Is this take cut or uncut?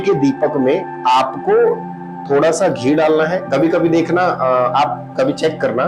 cut